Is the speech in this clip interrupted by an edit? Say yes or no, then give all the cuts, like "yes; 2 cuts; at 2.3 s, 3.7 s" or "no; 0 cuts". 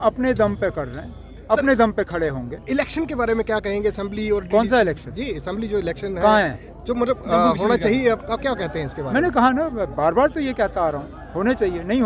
no; 0 cuts